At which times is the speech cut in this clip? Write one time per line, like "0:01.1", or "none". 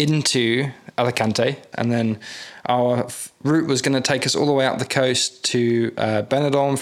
0:01.7